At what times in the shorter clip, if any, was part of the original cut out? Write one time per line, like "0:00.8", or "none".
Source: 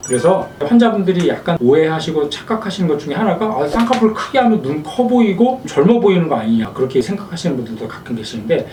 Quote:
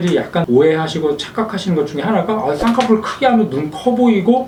none